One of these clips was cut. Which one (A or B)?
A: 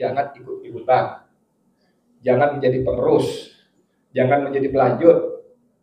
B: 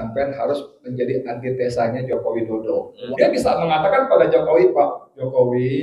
B